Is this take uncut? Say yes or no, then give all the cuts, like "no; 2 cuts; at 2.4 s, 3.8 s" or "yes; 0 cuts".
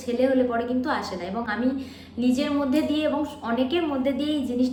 yes; 0 cuts